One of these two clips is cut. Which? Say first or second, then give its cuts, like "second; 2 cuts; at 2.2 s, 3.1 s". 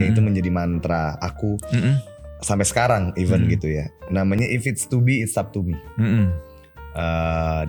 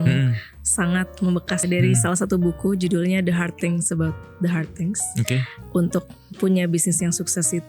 second; 2 cuts; at 1.6 s, 5.6 s